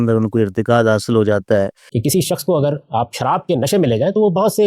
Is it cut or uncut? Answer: cut